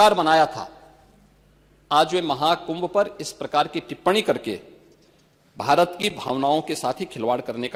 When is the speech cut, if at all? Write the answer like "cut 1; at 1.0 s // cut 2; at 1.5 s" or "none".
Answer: none